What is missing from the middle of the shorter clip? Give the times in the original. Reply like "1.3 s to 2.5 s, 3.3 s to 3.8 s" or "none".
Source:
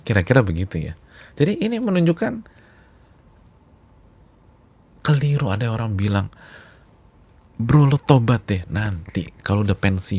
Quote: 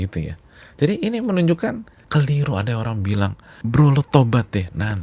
2.5 s to 4.9 s, 6.4 s to 7.4 s